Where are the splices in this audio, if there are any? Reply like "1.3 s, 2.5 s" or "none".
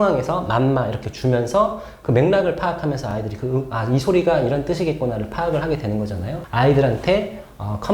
6.3 s